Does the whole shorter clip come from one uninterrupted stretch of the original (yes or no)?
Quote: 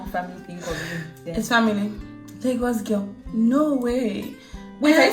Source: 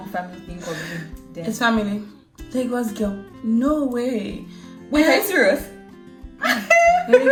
no